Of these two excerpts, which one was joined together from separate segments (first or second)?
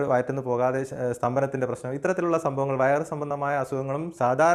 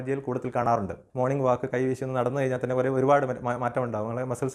second